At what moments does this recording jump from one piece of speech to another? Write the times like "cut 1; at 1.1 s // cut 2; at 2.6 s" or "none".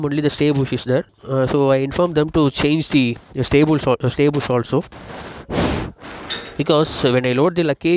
none